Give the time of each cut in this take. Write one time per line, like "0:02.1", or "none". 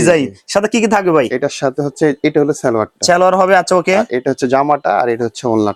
none